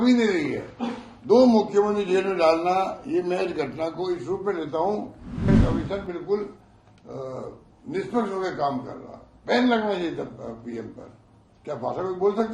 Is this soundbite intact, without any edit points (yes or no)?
no